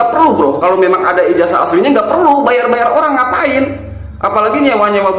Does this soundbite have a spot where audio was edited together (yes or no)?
no